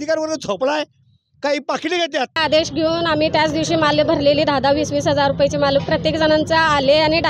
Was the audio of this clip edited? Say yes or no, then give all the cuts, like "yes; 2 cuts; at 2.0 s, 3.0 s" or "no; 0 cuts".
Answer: yes; 1 cut; at 2.4 s